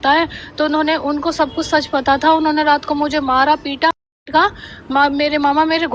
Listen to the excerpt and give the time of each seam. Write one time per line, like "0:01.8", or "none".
0:04.0